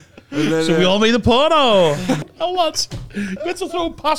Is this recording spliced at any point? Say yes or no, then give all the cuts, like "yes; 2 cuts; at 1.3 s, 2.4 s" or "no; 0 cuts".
yes; 1 cut; at 2.3 s